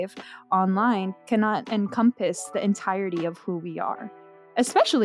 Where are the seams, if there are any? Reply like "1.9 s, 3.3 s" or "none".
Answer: 1.6 s